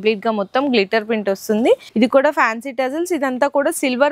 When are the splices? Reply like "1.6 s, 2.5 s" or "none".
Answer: 1.9 s

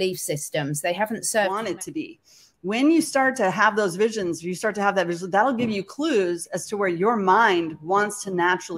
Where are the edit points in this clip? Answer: 1.7 s

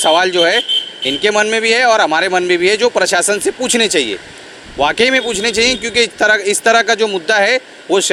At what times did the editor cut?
none

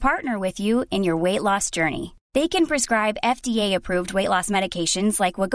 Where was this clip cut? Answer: none

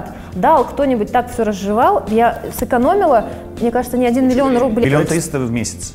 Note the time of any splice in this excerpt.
4.8 s

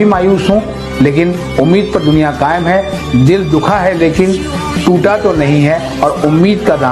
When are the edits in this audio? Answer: none

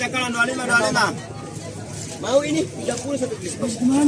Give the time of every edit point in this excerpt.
none

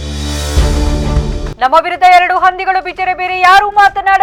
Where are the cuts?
none

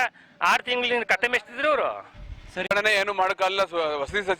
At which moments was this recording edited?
2.7 s

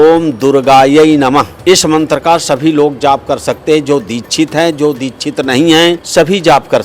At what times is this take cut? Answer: 1.5 s, 6.0 s

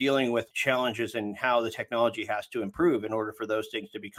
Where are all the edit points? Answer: none

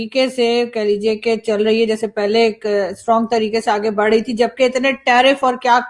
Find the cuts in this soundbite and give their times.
none

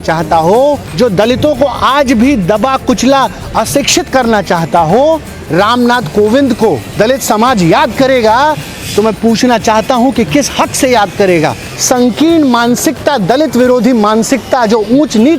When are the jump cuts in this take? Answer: 0.9 s, 5.3 s, 6.9 s, 11.7 s

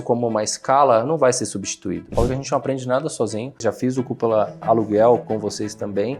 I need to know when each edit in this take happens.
2.1 s, 3.6 s, 4.6 s, 5.2 s

